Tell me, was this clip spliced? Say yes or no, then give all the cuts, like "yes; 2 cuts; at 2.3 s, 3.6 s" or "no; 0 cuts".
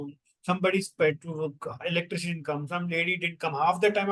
no; 0 cuts